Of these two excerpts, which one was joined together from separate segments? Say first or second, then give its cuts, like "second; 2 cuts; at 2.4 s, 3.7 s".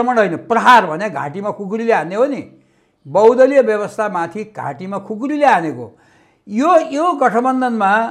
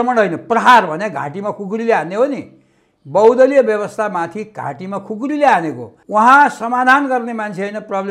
second; 1 cut; at 5.9 s